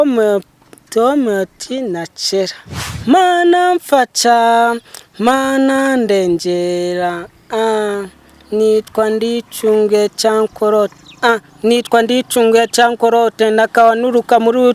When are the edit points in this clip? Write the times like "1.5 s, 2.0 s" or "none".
2.9 s